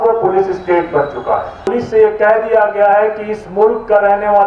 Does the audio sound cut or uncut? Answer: cut